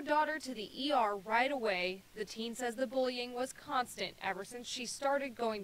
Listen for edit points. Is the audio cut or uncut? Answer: cut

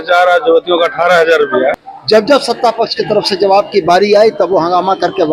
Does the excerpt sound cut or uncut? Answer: cut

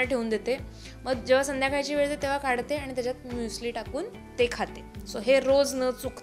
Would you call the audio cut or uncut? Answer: uncut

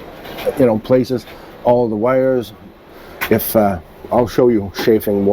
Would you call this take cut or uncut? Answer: uncut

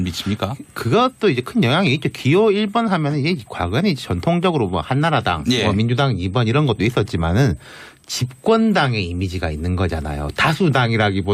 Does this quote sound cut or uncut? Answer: cut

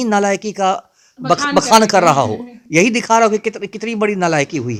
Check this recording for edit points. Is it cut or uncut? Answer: uncut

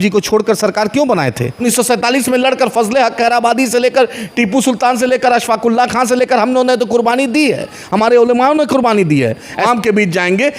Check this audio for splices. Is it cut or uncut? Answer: cut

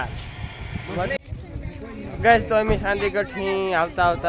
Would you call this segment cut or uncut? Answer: cut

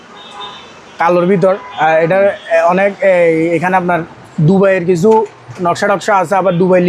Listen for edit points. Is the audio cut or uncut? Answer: uncut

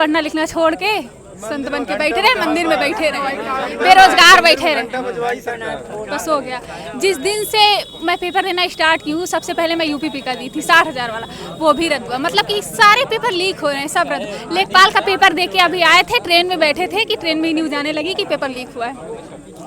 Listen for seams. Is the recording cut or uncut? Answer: uncut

